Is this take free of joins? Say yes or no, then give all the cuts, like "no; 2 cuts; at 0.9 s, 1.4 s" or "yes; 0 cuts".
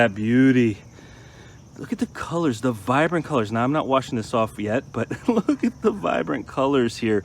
yes; 0 cuts